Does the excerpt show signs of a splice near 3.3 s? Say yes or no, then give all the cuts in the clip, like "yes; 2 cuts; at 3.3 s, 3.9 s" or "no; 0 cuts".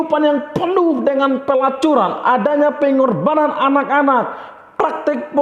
no; 0 cuts